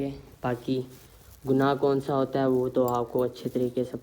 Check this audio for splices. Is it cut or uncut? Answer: uncut